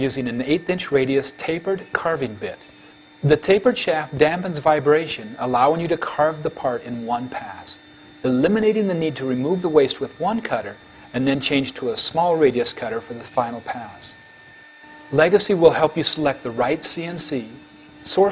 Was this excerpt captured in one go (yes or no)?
yes